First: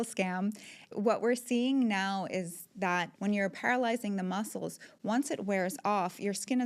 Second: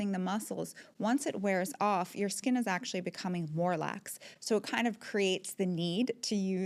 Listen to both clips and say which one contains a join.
first; 2 cuts; at 0.9 s, 3.1 s

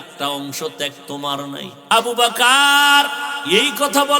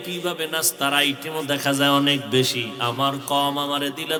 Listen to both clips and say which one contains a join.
first; 2 cuts; at 1.7 s, 3.3 s

